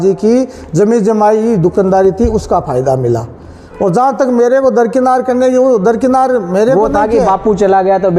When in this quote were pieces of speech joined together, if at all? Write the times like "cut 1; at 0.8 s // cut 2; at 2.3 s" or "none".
none

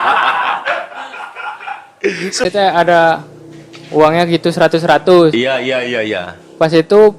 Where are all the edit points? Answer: cut 1; at 2.4 s

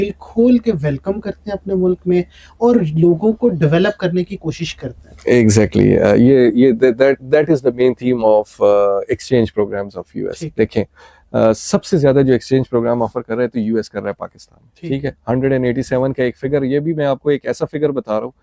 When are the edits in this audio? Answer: none

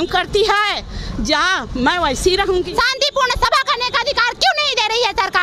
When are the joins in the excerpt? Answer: cut 1; at 2.7 s

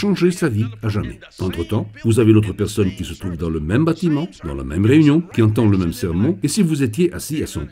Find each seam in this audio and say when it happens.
none

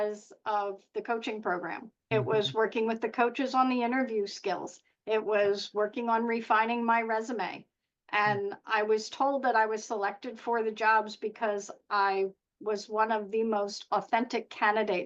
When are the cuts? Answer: none

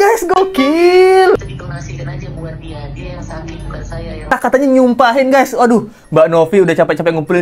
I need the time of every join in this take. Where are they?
cut 1; at 1.4 s // cut 2; at 4.3 s

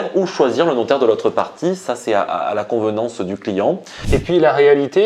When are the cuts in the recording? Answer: cut 1; at 3.9 s

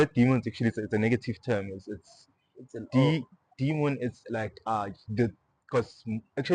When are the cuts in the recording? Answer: none

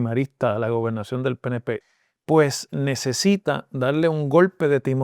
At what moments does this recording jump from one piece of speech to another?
cut 1; at 1.8 s

